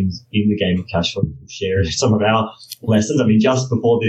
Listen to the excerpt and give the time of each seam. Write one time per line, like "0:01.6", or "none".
none